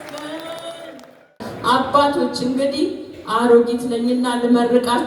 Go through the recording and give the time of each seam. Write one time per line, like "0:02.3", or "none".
0:01.4

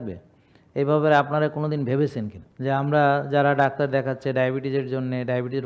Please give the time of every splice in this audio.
0:02.4

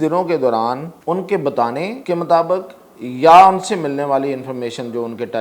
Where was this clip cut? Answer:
0:00.9
0:02.0

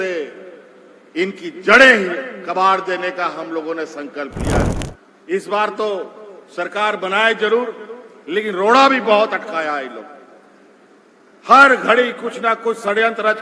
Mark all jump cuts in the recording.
0:04.7

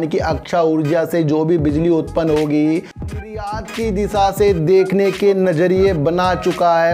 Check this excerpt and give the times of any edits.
0:03.2

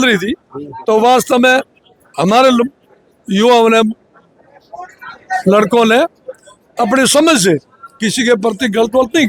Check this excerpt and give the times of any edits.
none

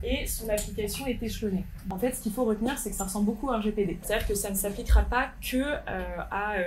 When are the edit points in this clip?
0:01.8
0:04.0

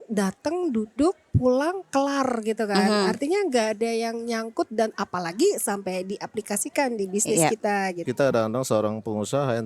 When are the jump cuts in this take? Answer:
0:08.0

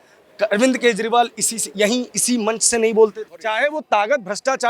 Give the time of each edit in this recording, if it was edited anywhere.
0:03.3

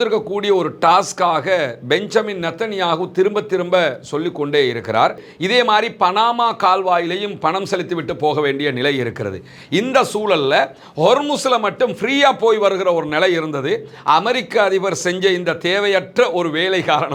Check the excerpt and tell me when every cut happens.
0:05.3

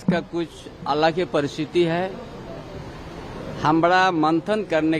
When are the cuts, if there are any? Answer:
none

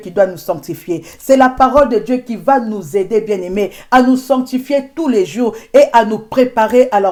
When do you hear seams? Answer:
none

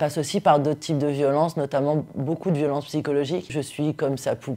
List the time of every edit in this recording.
0:03.6

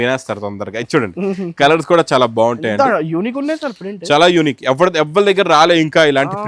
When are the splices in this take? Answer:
none

